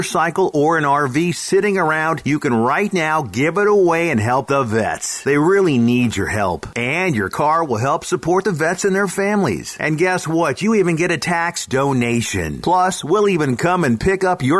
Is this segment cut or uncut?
uncut